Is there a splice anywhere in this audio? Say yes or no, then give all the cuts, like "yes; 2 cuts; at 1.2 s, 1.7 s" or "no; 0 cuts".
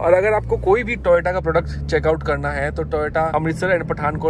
no; 0 cuts